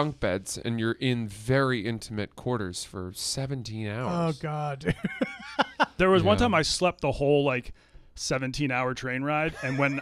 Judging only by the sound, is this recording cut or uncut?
cut